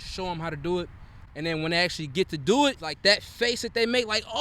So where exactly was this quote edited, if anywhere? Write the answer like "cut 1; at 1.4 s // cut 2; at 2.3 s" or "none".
cut 1; at 2.9 s

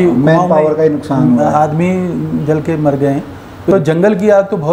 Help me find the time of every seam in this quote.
cut 1; at 3.7 s

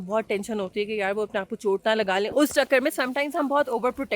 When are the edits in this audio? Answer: cut 1; at 2.3 s

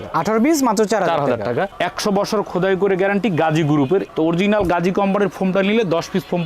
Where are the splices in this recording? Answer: cut 1; at 1.7 s // cut 2; at 4.1 s

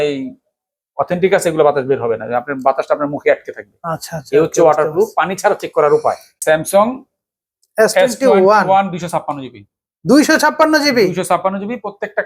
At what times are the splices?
cut 1; at 6.4 s

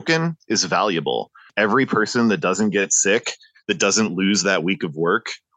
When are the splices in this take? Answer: cut 1; at 1.5 s

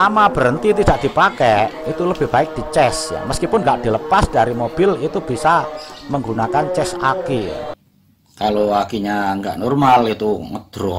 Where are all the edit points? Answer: cut 1; at 7.8 s

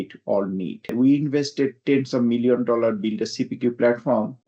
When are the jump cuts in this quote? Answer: cut 1; at 0.9 s

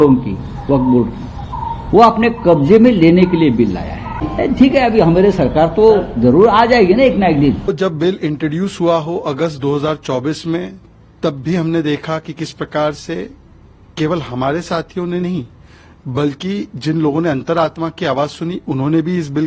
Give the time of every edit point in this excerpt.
cut 1; at 4.2 s // cut 2; at 7.7 s

